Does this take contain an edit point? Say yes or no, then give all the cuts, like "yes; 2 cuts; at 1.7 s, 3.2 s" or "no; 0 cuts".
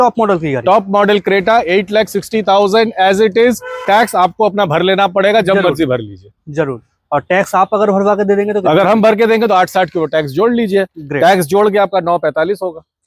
no; 0 cuts